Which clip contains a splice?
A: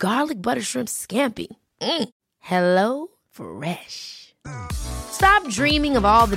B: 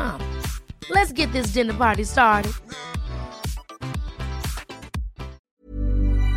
B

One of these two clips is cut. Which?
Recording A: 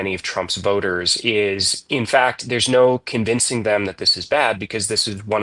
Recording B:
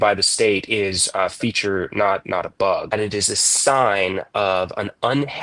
B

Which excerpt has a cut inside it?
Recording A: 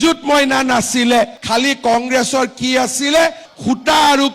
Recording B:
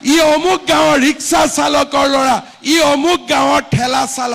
A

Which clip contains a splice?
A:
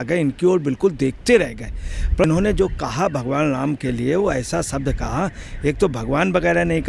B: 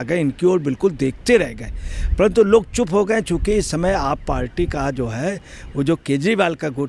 A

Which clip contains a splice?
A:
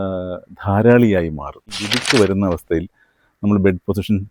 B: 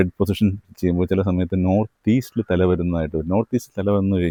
A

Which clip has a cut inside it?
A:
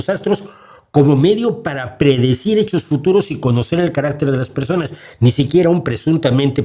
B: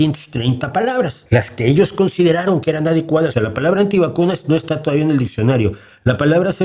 B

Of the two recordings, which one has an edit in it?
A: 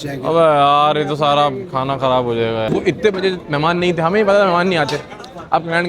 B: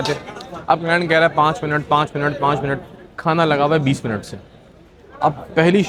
A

